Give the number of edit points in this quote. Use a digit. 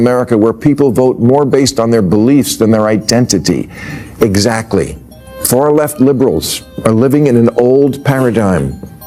0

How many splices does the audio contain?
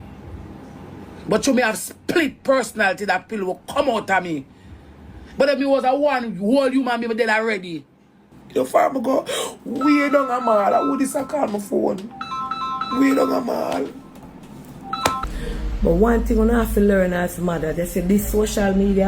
2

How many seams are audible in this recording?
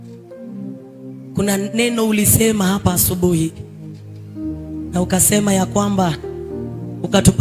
1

